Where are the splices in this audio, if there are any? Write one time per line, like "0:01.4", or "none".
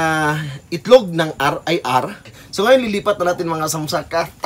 0:02.4

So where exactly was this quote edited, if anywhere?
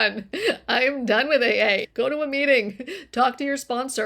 0:01.9

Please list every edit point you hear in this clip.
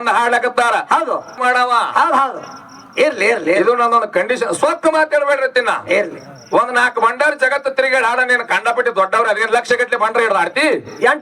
0:01.4

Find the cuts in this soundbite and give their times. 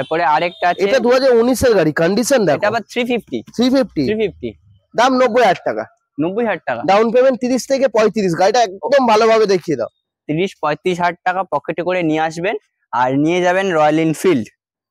none

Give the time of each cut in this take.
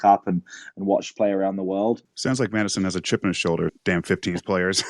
0:02.1
0:03.8

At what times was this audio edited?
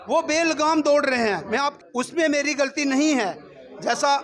0:01.7

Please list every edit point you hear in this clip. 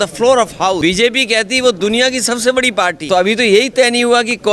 0:00.8
0:03.0

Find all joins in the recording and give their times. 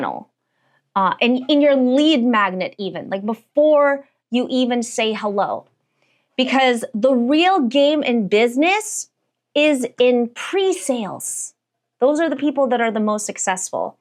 none

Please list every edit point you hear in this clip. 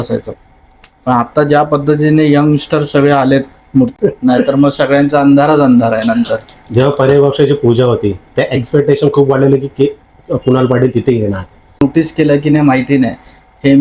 0:03.9
0:11.8

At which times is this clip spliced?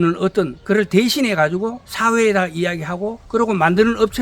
0:01.8
0:03.1

